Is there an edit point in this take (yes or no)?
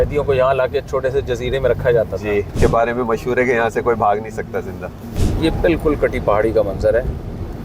yes